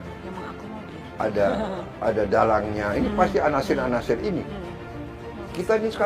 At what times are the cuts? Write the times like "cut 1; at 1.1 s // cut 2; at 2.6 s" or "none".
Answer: cut 1; at 5.0 s